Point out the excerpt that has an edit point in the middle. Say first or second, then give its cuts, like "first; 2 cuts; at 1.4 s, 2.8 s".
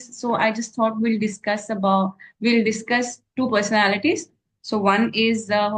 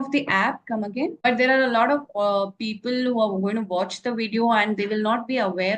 second; 1 cut; at 1.2 s